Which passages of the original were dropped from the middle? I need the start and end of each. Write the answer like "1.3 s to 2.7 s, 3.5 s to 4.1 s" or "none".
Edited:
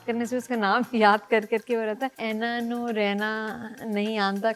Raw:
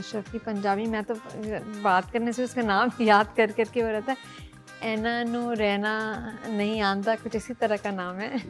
4.2 s to 4.8 s